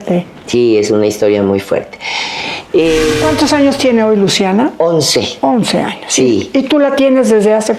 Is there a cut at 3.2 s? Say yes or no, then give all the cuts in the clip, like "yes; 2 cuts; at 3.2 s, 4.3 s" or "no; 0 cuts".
yes; 1 cut; at 3.2 s